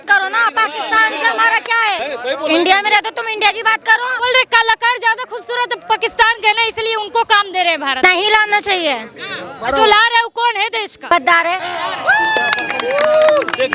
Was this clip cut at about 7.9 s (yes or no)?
yes